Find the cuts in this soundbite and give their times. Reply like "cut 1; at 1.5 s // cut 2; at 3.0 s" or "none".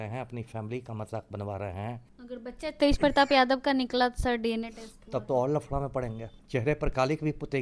cut 1; at 2.1 s // cut 2; at 6.4 s